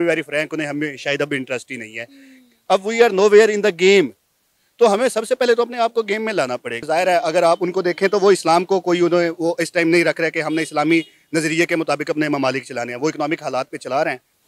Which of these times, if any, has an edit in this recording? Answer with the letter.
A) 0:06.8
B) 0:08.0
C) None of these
A